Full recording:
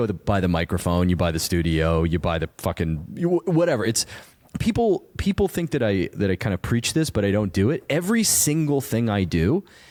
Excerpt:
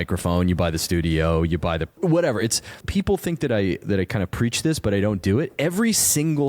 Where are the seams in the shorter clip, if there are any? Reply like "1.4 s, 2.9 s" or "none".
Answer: 2.0 s, 2.8 s

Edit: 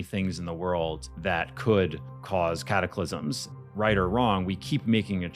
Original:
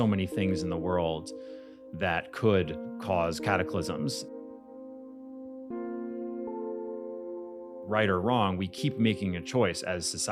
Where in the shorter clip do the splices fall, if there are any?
1.1 s, 3.6 s

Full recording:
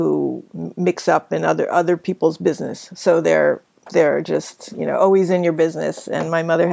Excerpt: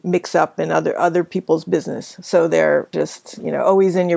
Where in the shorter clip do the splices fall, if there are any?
2.9 s

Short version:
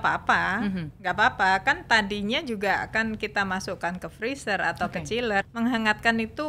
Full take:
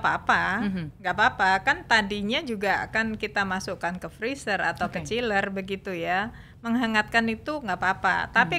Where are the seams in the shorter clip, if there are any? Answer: 5.5 s

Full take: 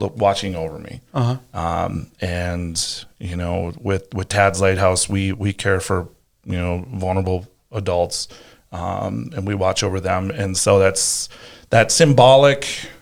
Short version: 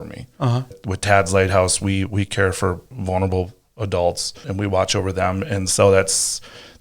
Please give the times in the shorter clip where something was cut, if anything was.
0.8 s, 2.9 s, 4.4 s

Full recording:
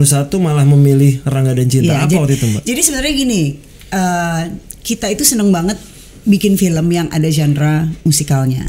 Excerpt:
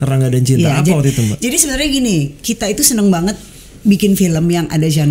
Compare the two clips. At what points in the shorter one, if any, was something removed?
2.3 s

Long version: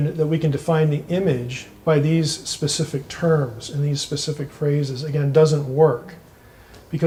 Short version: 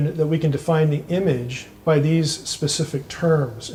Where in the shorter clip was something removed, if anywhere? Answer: none

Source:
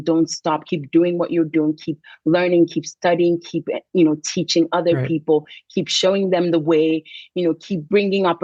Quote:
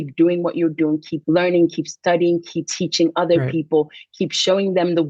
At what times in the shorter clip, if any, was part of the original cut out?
1.1 s, 2.7 s

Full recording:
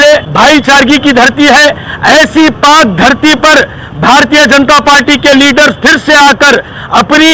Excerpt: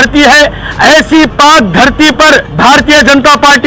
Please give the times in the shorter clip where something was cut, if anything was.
2.5 s

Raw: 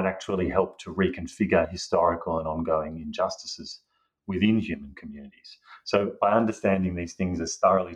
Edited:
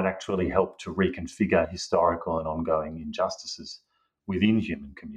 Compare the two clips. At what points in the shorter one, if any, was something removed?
none

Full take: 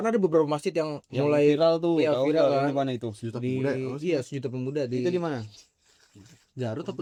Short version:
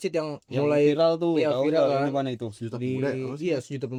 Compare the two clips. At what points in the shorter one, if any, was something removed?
none

